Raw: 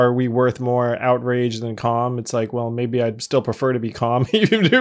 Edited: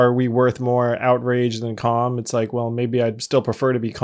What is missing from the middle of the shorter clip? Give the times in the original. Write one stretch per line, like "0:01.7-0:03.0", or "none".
none